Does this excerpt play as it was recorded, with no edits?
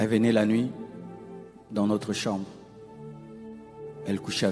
yes; 0 cuts

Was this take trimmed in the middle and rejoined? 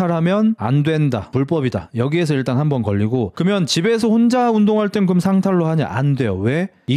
no; 0 cuts

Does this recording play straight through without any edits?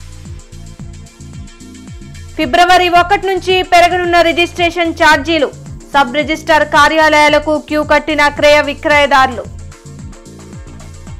no; 1 cut; at 1.9 s

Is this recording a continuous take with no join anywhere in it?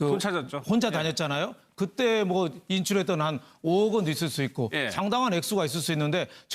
no; 1 cut; at 2.6 s

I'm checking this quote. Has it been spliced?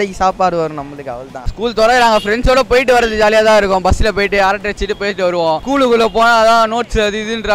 yes; 1 cut; at 1.4 s

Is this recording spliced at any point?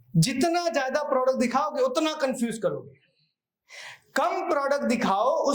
no; 0 cuts

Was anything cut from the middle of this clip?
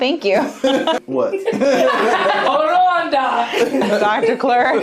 yes; 3 cuts; at 1.0 s, 2.5 s, 3.8 s

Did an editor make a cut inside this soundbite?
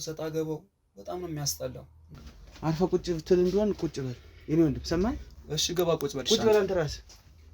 yes; 1 cut; at 2.0 s

